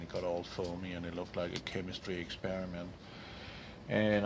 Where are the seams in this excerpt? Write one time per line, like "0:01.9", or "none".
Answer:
0:01.3